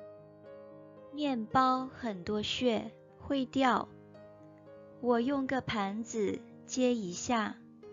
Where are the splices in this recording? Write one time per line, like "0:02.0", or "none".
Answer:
0:01.1